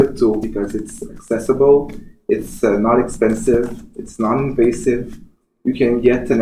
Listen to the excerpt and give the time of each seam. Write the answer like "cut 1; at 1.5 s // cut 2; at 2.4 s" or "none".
none